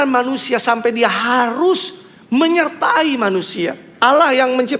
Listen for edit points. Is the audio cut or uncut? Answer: cut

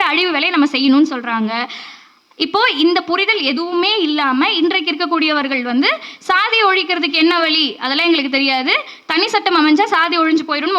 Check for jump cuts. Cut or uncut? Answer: uncut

